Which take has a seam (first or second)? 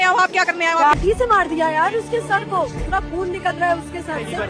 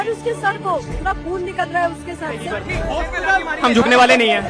first